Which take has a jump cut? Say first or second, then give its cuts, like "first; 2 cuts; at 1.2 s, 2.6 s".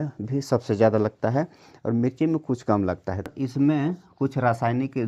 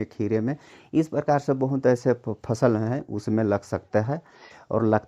first; 1 cut; at 3.3 s